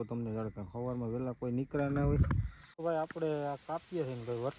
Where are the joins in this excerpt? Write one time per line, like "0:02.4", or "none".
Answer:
0:02.8